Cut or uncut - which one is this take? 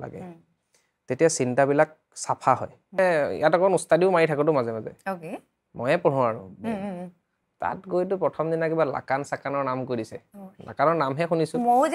cut